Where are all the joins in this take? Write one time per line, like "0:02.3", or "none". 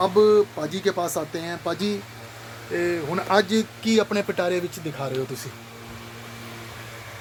none